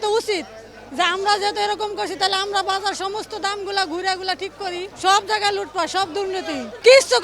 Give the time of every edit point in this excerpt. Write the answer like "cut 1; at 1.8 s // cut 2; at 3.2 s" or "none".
cut 1; at 4.9 s